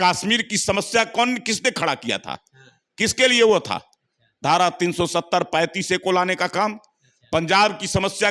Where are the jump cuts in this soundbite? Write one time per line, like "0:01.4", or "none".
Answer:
none